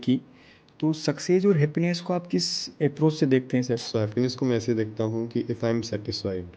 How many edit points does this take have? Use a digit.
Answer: 1